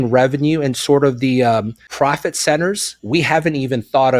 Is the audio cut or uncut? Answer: cut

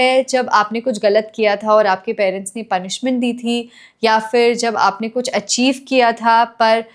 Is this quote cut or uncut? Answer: uncut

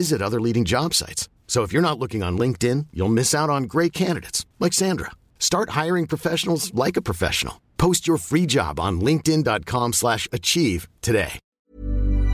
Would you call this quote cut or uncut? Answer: cut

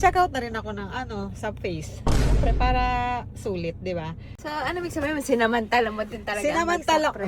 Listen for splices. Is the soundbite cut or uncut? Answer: cut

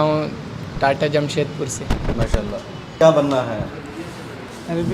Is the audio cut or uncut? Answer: cut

